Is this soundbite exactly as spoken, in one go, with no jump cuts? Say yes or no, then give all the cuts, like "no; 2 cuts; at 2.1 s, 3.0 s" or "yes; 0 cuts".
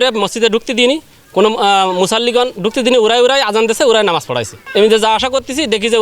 no; 1 cut; at 4.5 s